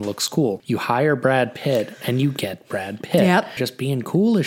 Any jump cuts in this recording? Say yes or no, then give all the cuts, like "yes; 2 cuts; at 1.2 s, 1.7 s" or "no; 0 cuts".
yes; 1 cut; at 3.5 s